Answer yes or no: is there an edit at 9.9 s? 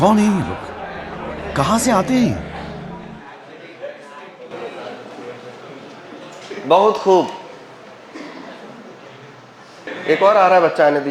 yes